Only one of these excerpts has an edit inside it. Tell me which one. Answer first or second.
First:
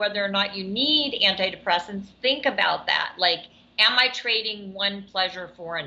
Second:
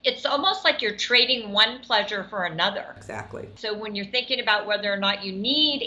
second